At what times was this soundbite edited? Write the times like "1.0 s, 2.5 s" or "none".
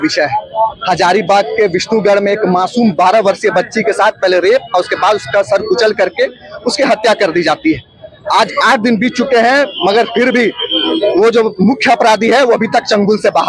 none